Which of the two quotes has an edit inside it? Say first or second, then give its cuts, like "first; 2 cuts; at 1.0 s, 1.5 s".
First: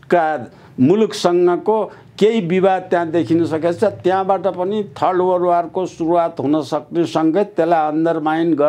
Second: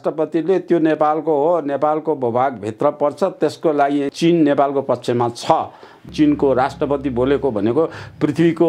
second; 2 cuts; at 4.1 s, 6.0 s